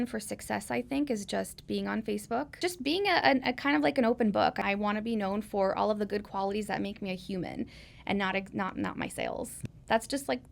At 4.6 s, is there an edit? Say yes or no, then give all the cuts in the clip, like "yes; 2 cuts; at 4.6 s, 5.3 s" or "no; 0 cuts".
yes; 3 cuts; at 2.5 s, 4.6 s, 9.6 s